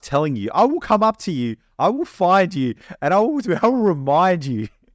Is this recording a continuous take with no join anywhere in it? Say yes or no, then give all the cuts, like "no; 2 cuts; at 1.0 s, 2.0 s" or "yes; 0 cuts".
yes; 0 cuts